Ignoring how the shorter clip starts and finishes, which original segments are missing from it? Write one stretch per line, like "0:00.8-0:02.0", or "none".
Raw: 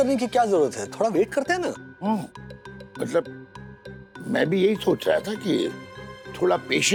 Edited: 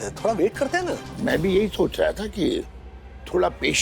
0:01.8-0:04.2